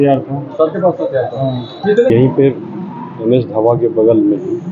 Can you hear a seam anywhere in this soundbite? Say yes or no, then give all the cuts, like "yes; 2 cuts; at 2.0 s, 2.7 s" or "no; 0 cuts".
yes; 1 cut; at 2.1 s